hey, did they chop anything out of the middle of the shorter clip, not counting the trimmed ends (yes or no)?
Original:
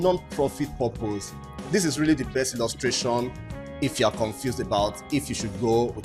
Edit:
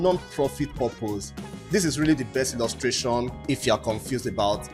yes